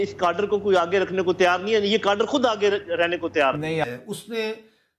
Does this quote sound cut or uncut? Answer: cut